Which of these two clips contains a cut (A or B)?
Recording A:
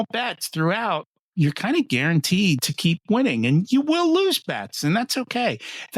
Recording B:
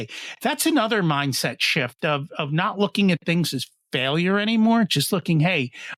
A